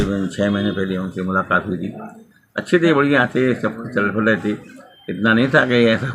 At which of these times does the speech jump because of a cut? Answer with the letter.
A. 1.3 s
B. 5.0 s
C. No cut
C